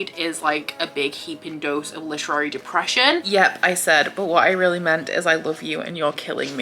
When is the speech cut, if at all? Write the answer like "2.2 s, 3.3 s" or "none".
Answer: 3.2 s